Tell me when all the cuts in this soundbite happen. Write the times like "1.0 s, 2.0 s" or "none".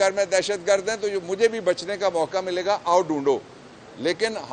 none